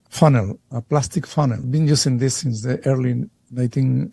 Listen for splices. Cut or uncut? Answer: cut